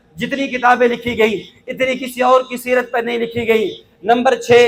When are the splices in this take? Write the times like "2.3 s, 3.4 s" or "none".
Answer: none